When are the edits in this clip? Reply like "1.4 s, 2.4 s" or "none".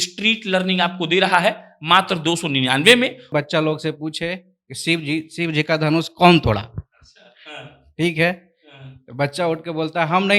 3.2 s